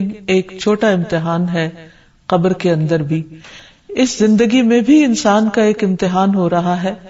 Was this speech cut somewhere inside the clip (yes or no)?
yes